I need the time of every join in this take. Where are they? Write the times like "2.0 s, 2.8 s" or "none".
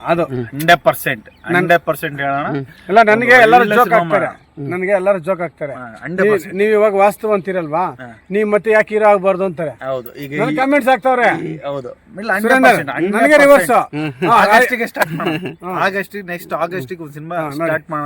none